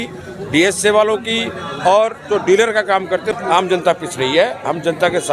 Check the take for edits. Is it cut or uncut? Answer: cut